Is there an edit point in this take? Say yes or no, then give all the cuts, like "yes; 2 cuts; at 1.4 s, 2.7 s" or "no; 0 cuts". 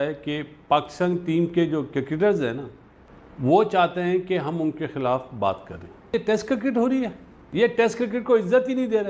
yes; 2 cuts; at 6.1 s, 7.4 s